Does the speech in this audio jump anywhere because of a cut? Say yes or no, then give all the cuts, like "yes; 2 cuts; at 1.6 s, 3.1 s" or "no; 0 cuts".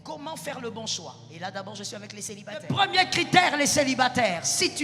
yes; 1 cut; at 2.6 s